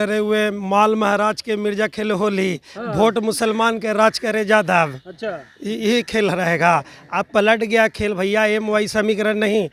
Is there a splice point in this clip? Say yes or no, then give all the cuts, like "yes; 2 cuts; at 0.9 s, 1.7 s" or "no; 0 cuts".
no; 0 cuts